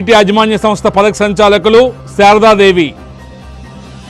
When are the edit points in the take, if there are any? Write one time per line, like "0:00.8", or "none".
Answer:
0:02.9